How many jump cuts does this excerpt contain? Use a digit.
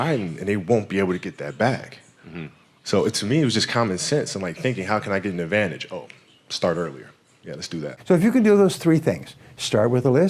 1